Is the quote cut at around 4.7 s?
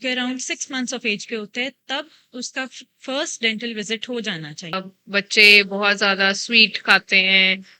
yes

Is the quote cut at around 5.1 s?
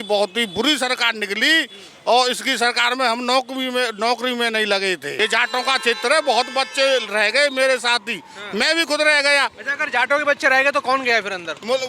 yes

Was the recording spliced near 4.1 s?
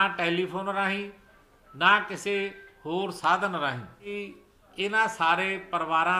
yes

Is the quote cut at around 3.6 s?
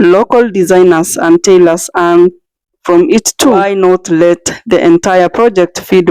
yes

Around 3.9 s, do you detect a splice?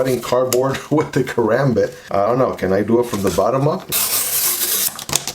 yes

